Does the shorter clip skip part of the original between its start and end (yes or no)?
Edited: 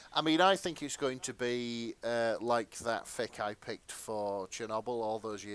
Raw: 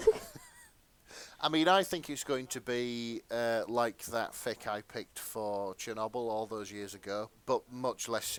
no